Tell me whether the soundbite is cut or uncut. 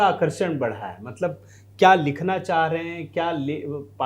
uncut